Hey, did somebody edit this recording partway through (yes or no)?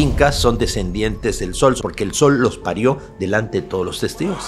yes